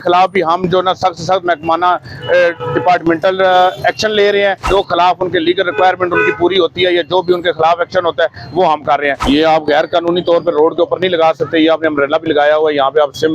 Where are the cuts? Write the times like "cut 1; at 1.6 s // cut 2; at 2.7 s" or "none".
cut 1; at 4.6 s // cut 2; at 9.2 s